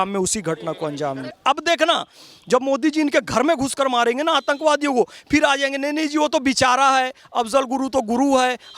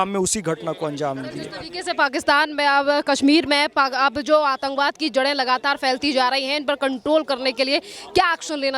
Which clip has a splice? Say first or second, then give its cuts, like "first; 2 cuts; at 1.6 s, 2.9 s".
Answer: first; 1 cut; at 1.4 s